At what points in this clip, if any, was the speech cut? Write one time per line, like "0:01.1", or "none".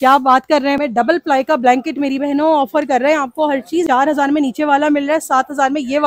0:00.8
0:03.8

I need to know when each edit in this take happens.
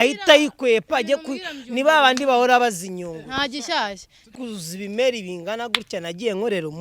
0:04.3

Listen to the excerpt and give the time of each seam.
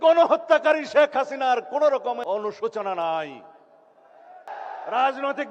0:02.2
0:04.5

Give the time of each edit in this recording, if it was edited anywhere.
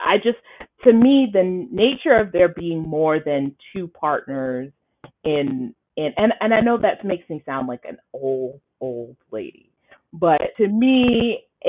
0:10.5

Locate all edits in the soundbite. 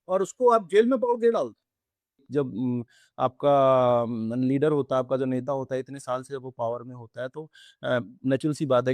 0:02.2

